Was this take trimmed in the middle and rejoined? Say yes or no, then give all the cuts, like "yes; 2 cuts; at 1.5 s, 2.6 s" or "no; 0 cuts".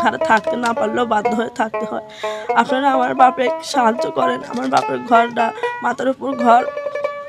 no; 0 cuts